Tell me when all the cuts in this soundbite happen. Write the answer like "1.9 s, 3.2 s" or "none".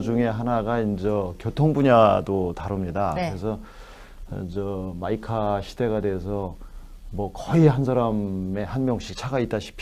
none